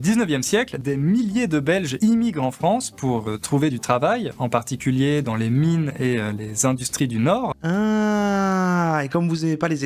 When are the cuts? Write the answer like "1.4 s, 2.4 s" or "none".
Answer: 0.8 s, 1.9 s